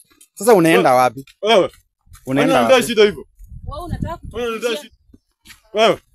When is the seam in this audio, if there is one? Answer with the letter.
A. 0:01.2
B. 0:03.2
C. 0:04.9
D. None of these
C